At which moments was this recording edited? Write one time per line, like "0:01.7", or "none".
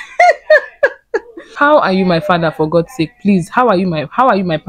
0:01.5